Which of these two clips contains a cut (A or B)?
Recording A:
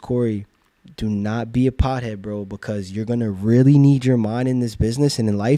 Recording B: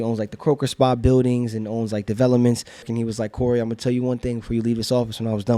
B